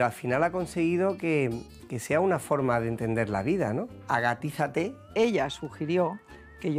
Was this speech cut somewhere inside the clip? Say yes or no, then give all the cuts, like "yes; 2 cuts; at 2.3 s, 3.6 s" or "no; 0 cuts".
yes; 2 cuts; at 4.0 s, 5.1 s